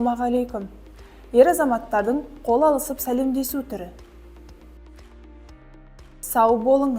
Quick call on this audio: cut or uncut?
cut